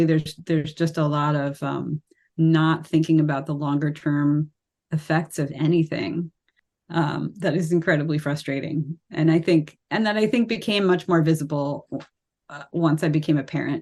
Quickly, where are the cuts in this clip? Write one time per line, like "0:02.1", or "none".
none